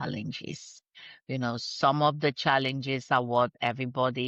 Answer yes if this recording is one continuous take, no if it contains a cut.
yes